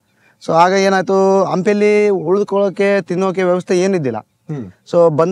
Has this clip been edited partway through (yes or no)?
no